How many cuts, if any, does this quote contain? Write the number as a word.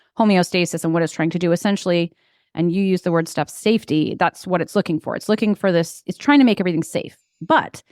zero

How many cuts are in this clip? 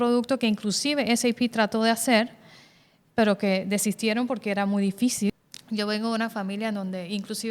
one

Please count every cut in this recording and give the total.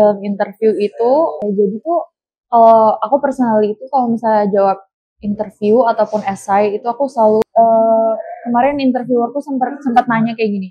two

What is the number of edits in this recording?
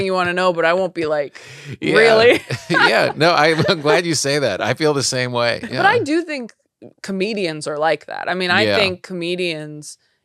one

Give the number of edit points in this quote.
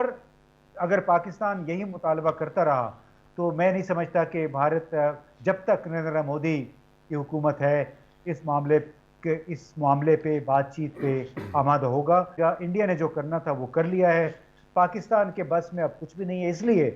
one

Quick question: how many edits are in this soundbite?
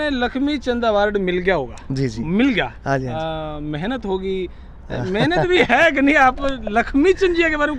zero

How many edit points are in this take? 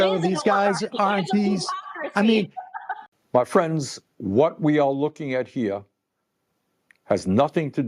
one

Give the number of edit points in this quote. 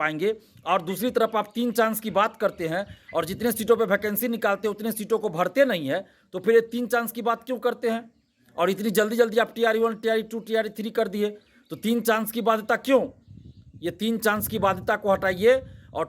zero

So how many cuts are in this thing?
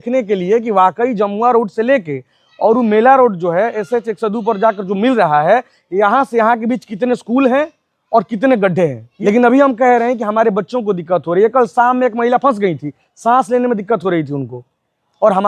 one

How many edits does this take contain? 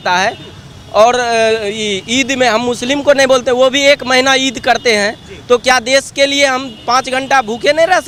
zero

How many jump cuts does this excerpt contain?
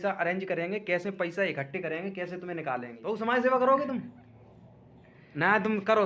one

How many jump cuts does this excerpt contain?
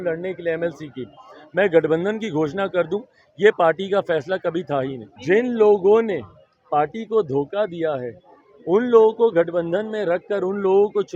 one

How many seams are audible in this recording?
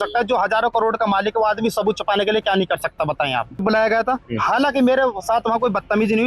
one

